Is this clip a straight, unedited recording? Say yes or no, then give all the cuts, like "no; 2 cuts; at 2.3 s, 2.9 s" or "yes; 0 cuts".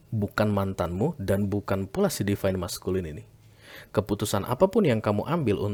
yes; 0 cuts